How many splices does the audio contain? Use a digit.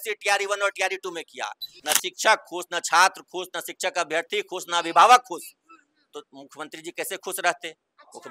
1